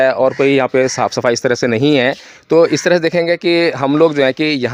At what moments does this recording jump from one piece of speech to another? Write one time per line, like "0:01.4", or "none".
none